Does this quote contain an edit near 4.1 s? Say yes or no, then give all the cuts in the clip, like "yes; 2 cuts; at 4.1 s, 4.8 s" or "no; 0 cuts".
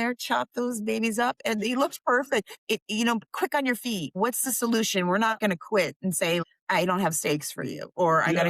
yes; 4 cuts; at 2.5 s, 4.1 s, 5.4 s, 6.4 s